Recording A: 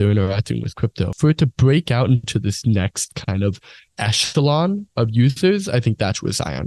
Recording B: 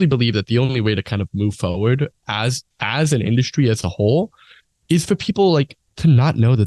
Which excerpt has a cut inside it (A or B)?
A